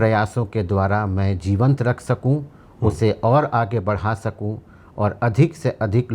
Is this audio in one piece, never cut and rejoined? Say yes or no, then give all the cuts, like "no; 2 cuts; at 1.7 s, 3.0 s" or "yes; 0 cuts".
yes; 0 cuts